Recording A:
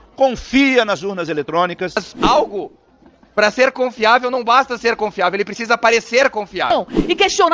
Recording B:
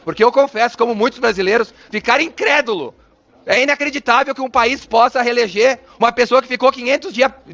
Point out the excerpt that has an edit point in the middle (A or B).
A